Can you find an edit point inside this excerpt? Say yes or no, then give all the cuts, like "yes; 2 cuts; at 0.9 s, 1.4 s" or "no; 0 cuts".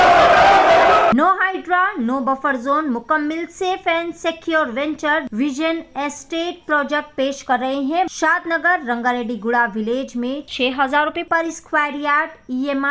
yes; 3 cuts; at 1.1 s, 5.3 s, 8.1 s